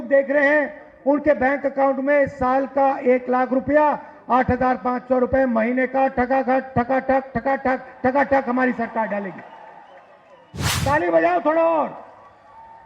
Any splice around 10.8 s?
yes; 1 cut; at 10.8 s

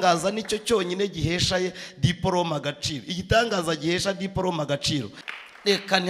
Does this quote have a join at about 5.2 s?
yes; 1 cut; at 5.2 s

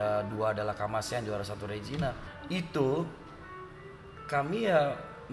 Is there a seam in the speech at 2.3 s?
yes; 1 cut; at 2.3 s

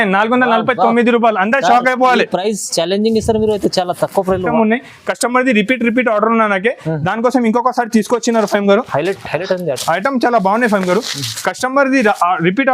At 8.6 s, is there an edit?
no; 1 cut; at 4.5 s

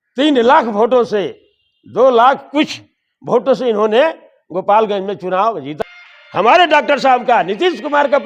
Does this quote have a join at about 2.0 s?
no; 1 cut; at 5.7 s

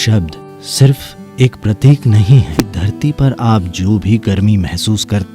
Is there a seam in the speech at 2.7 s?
yes; 1 cut; at 2.7 s

